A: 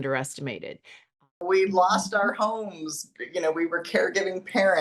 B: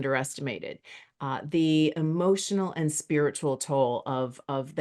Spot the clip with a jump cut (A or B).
A